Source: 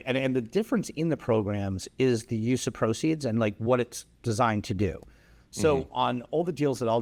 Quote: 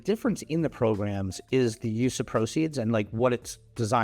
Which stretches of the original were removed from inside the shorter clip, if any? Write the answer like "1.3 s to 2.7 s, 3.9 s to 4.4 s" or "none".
none